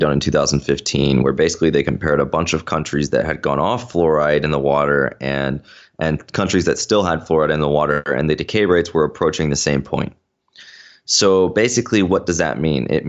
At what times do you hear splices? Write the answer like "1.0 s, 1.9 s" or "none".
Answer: none

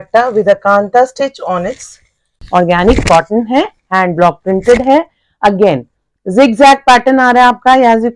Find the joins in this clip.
2.3 s

